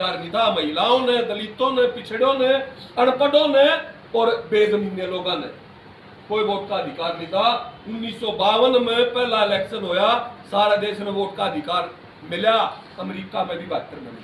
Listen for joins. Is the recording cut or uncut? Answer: uncut